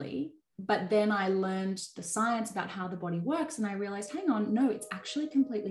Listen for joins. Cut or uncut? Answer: uncut